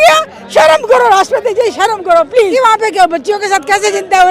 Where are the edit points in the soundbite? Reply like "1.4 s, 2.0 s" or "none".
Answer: 2.5 s